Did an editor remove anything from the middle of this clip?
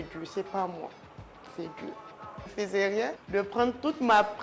yes; 1 cut; at 2.4 s

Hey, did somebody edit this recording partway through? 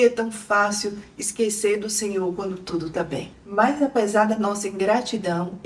yes; 1 cut; at 3.3 s

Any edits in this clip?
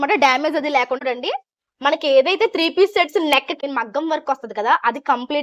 yes; 2 cuts; at 1.0 s, 3.6 s

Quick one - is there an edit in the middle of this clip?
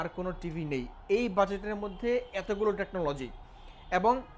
no; 0 cuts

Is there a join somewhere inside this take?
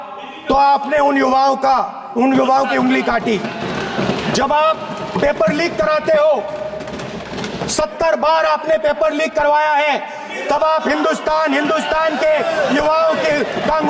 no; 0 cuts

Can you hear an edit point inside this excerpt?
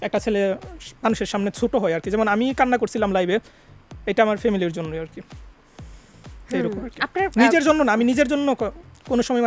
no; 0 cuts

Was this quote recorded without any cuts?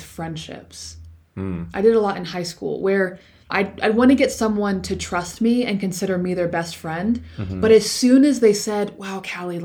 yes; 0 cuts

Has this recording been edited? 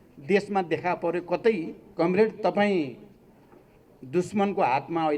yes; 1 cut; at 1.8 s

